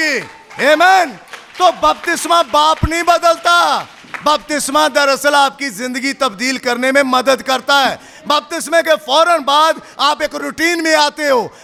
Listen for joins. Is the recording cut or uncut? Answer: uncut